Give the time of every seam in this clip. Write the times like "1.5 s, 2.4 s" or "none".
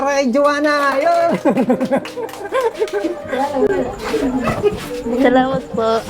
none